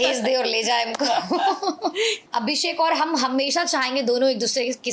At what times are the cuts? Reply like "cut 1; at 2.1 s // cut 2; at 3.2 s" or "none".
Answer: cut 1; at 2.2 s